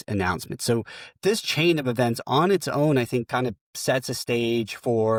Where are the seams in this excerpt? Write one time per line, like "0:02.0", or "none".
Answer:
none